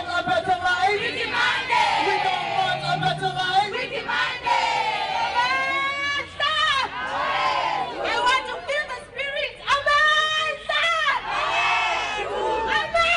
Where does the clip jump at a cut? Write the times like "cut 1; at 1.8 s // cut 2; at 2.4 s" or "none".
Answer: cut 1; at 6.7 s

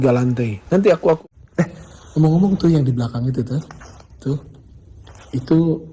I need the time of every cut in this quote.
cut 1; at 1.2 s

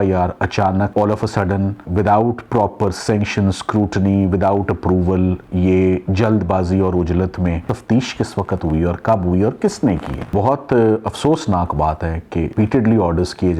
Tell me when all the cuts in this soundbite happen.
cut 1; at 0.9 s // cut 2; at 7.7 s // cut 3; at 10.3 s // cut 4; at 12.5 s

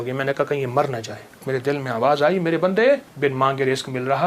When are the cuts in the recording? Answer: cut 1; at 1.4 s // cut 2; at 3.1 s

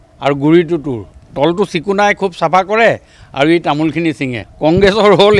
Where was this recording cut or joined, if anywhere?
none

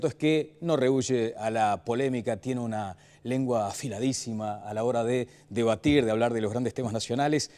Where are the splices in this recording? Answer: none

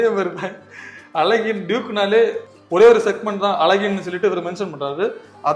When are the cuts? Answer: none

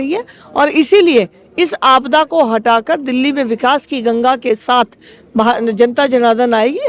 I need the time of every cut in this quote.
none

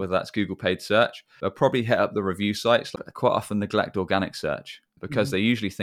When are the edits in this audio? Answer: cut 1; at 3.0 s

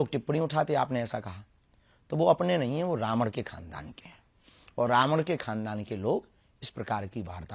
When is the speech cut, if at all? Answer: none

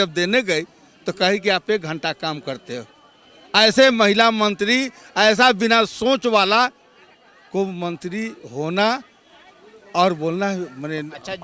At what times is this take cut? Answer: none

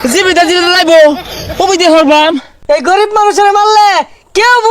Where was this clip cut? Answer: cut 1; at 2.5 s

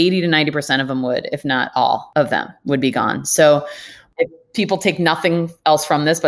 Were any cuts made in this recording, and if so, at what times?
cut 1; at 2.1 s // cut 2; at 4.0 s

